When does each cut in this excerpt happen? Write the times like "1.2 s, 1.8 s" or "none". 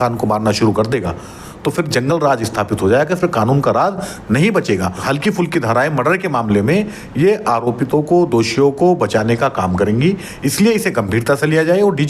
5.0 s